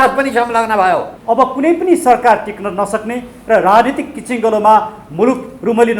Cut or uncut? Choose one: cut